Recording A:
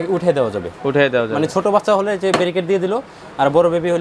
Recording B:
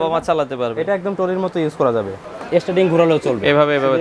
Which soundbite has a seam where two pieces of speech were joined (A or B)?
B